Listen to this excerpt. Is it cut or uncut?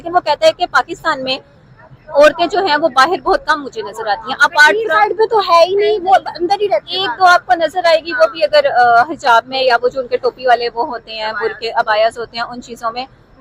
uncut